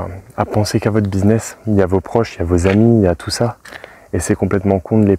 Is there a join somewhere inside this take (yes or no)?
no